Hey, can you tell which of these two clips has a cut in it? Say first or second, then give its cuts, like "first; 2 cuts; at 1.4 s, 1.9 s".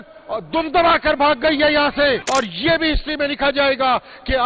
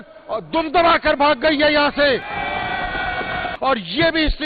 first; 1 cut; at 2.2 s